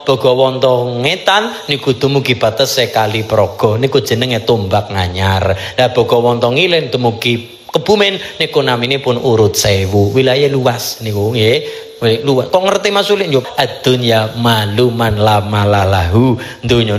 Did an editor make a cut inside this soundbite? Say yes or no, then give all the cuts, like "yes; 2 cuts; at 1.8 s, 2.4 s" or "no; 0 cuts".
yes; 1 cut; at 13.5 s